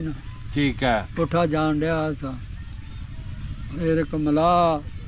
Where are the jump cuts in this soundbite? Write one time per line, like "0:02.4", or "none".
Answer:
none